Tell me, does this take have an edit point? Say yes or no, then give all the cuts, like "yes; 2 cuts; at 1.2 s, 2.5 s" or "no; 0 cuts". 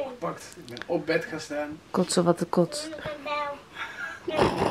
no; 0 cuts